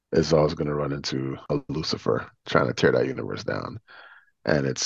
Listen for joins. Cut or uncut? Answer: cut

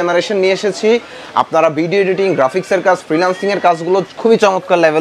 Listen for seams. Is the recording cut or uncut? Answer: uncut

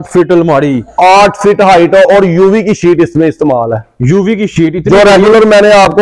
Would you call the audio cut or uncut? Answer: uncut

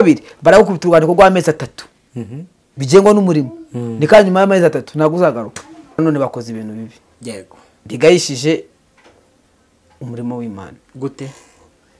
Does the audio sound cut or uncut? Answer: cut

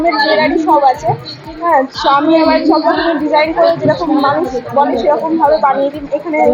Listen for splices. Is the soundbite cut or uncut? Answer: uncut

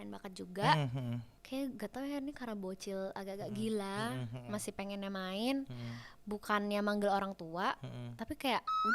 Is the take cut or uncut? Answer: cut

